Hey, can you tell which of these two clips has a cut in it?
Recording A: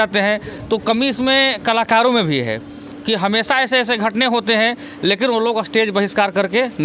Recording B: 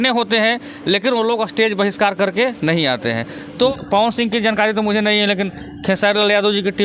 B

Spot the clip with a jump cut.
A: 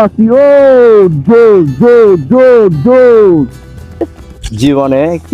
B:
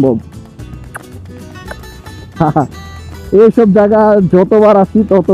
A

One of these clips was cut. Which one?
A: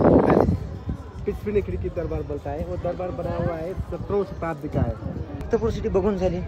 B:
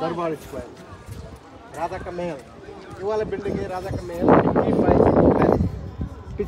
A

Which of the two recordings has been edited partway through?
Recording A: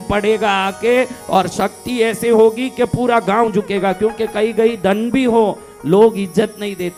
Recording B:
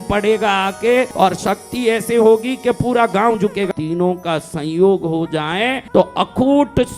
B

